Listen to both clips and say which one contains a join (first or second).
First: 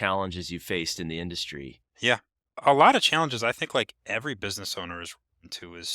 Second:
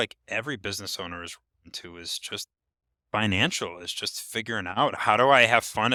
first